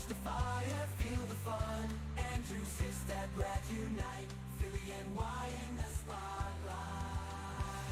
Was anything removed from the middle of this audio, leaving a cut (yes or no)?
no